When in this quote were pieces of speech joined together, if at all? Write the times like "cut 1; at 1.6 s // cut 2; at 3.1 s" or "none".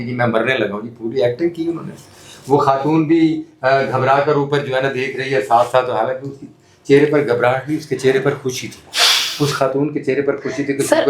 none